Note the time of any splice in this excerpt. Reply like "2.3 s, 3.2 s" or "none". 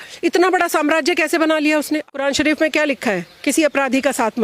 2.1 s